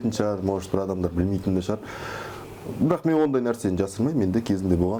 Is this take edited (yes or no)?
no